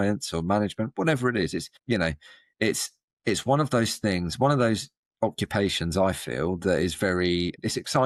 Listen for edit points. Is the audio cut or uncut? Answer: uncut